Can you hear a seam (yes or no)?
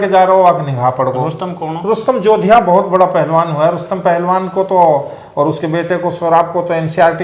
no